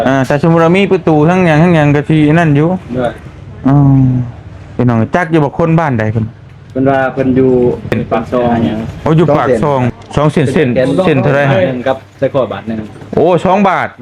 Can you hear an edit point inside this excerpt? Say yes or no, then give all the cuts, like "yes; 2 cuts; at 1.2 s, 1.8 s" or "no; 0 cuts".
yes; 1 cut; at 9.9 s